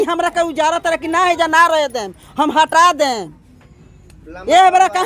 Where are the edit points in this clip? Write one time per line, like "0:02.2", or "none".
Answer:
none